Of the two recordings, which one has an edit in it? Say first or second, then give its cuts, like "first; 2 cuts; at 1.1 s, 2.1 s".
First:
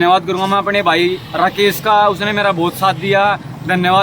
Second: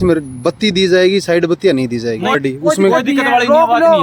second; 1 cut; at 2.4 s